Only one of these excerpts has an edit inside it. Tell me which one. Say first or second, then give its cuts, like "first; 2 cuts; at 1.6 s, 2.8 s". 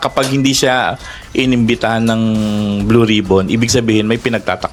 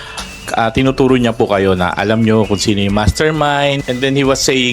second; 1 cut; at 3.8 s